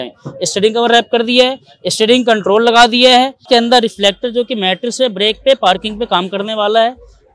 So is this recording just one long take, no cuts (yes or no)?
no